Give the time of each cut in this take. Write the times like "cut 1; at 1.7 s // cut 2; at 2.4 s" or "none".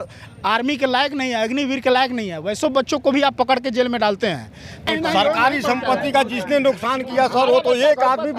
cut 1; at 4.9 s